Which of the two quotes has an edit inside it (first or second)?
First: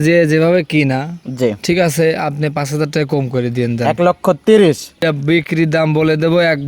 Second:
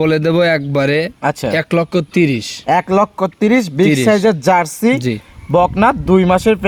first